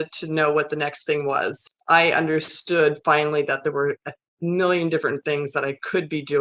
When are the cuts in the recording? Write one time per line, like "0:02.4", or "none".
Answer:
0:01.6